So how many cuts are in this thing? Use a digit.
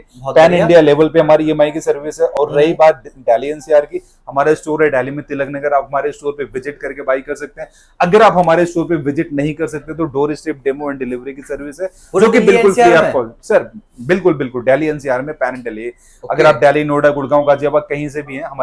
0